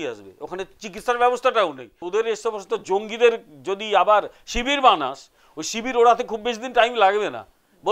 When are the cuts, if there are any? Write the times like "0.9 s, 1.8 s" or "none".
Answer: 1.9 s